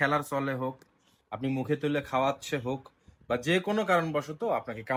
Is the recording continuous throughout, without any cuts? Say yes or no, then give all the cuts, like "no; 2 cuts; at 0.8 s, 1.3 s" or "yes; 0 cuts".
yes; 0 cuts